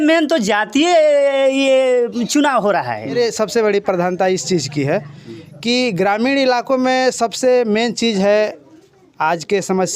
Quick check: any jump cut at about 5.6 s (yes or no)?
no